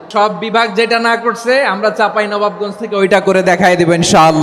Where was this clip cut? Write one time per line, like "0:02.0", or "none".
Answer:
none